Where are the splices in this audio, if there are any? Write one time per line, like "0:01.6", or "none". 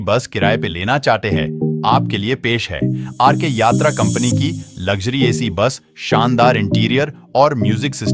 none